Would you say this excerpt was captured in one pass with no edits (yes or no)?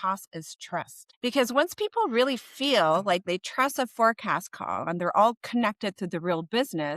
no